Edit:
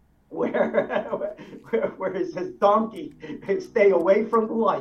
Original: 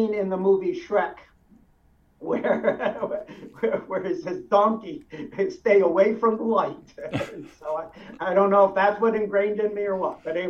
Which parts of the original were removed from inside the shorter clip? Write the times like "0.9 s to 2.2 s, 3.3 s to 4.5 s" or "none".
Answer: none